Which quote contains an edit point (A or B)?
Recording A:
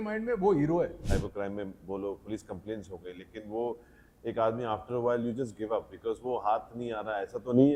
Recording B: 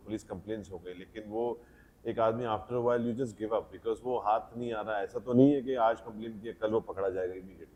A